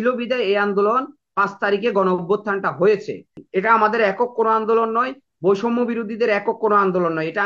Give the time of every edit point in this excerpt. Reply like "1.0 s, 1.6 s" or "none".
3.4 s